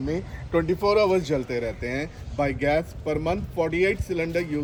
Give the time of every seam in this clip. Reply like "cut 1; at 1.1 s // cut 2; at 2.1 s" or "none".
none